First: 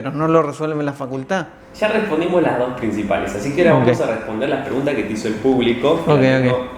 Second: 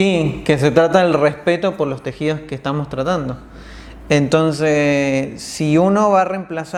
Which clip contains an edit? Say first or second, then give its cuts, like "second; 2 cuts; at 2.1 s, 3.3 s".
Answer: first; 1 cut; at 1.6 s